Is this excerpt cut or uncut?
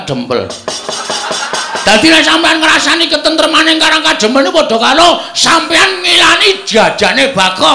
cut